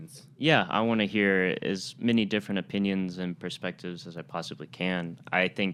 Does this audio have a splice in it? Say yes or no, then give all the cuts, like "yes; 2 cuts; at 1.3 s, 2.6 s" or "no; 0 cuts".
no; 0 cuts